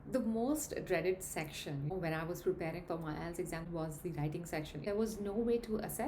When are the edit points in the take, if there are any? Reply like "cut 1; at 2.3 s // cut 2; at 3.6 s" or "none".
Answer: cut 1; at 1.9 s // cut 2; at 3.6 s // cut 3; at 4.8 s

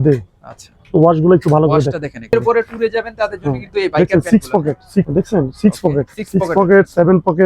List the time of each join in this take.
cut 1; at 2.3 s // cut 2; at 5.1 s

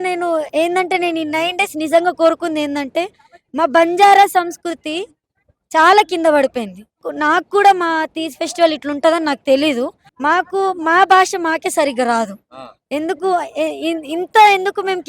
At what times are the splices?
cut 1; at 7.1 s // cut 2; at 10.0 s

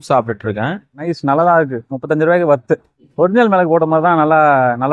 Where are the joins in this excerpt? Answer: cut 1; at 1.0 s // cut 2; at 3.0 s

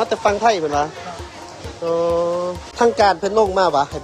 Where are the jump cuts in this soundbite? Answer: cut 1; at 2.6 s

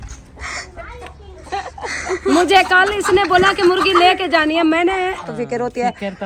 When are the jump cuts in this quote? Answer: cut 1; at 1.7 s // cut 2; at 5.3 s

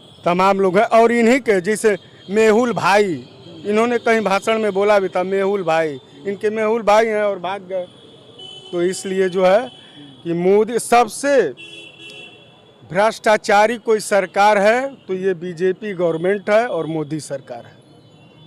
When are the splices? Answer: none

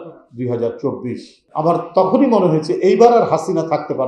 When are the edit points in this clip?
cut 1; at 1.4 s

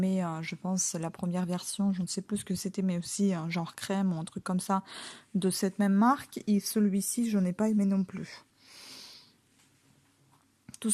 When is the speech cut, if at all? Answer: none

